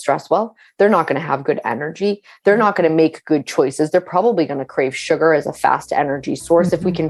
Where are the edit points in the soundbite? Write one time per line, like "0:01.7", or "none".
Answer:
none

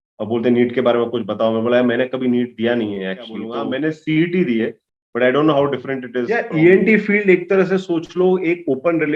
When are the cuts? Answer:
0:03.5
0:06.3

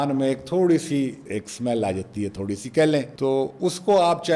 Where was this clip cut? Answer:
none

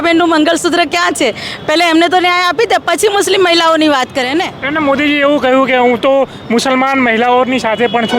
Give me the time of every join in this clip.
0:04.6

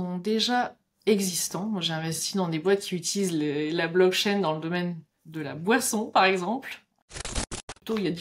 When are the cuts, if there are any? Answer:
0:07.2

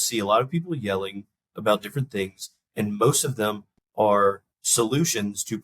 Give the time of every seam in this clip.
0:04.5

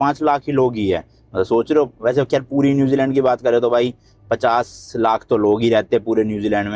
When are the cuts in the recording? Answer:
none

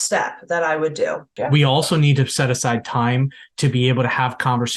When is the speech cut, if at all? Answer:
0:01.3

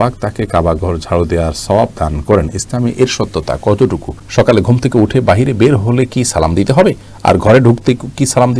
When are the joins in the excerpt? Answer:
0:04.2

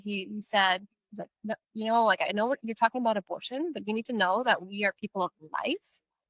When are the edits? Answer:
none

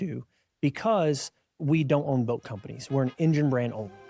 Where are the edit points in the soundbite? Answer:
0:01.6

